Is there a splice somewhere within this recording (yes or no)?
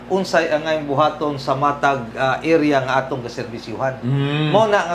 no